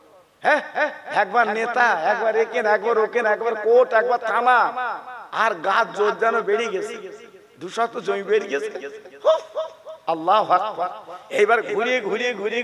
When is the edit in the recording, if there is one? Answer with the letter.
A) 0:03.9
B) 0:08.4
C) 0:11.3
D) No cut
D